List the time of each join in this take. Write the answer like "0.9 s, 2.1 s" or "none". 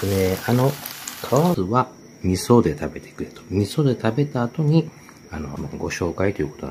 1.5 s, 5.6 s